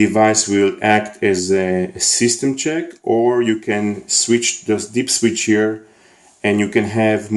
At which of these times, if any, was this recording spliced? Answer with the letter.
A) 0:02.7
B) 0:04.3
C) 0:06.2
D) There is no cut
B